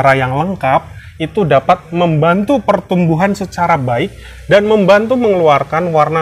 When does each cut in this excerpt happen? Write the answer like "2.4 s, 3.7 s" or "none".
none